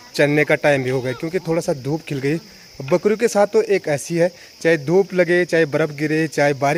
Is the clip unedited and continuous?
yes; 0 cuts

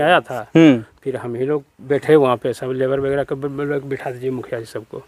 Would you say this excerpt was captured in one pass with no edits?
yes; 0 cuts

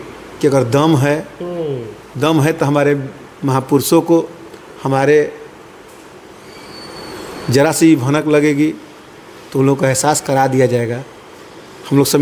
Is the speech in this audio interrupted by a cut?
no; 0 cuts

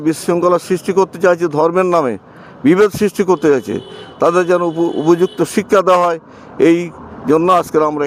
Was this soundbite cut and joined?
no; 0 cuts

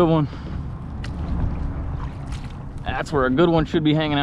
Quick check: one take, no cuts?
yes; 0 cuts

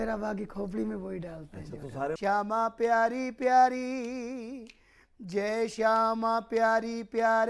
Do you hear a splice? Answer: yes; 1 cut; at 2.2 s

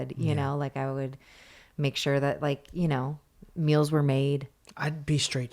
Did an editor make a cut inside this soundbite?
yes; 1 cut; at 4.6 s

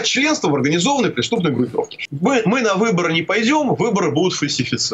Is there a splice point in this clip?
yes; 1 cut; at 2.0 s

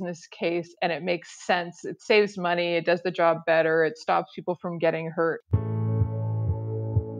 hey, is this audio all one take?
no; 1 cut; at 5.5 s

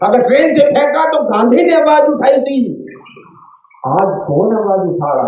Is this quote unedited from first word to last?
yes; 0 cuts

